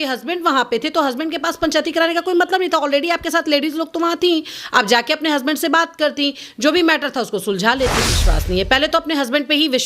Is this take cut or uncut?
cut